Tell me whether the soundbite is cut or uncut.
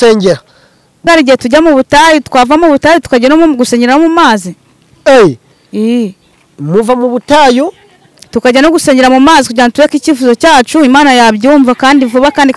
cut